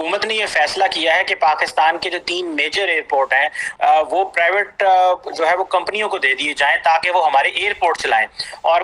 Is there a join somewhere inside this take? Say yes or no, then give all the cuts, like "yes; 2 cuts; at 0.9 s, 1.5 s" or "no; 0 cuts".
no; 0 cuts